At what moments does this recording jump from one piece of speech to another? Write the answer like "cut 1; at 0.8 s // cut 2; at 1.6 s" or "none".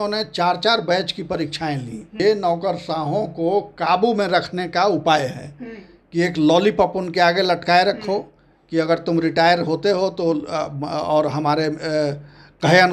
cut 1; at 2.2 s